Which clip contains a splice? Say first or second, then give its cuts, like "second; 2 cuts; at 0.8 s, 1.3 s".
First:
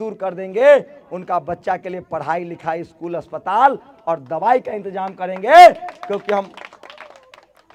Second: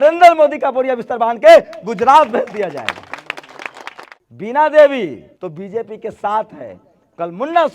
second; 2 cuts; at 4.1 s, 5.3 s